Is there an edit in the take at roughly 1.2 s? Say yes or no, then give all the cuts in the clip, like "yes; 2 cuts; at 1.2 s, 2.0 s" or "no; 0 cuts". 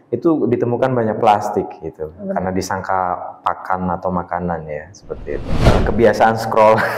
no; 1 cut; at 5.5 s